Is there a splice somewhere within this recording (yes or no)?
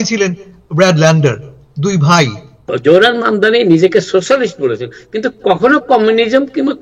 yes